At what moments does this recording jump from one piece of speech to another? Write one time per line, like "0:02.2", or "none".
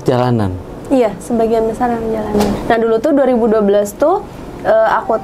0:02.6